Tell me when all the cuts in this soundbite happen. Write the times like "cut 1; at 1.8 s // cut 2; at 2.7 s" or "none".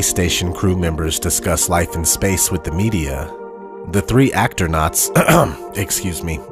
cut 1; at 1.6 s